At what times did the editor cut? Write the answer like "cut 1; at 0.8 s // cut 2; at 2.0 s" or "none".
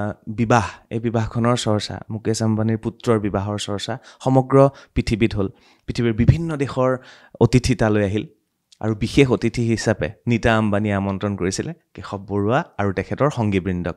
none